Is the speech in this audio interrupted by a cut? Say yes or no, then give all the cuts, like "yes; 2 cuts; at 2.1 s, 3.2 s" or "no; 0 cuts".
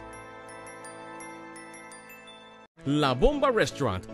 yes; 1 cut; at 2.6 s